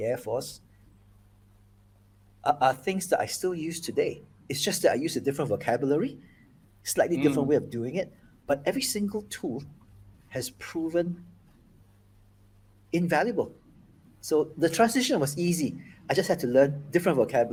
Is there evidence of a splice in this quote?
no; 0 cuts

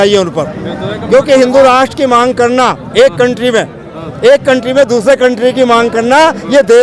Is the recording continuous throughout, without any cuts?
yes; 0 cuts

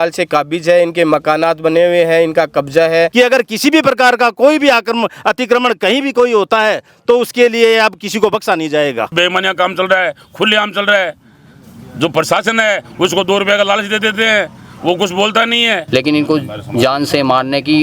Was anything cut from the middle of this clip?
yes; 3 cuts; at 3.1 s, 9.1 s, 15.8 s

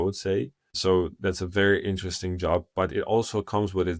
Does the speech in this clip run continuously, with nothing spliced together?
yes; 0 cuts

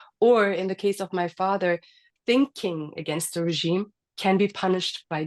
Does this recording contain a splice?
yes; 1 cut; at 2.1 s

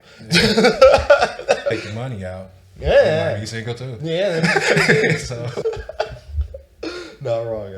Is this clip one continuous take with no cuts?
no; 2 cuts; at 1.7 s, 5.6 s

